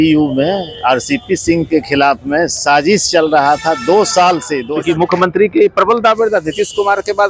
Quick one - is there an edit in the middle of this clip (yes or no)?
yes